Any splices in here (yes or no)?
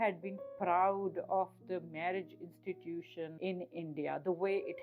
yes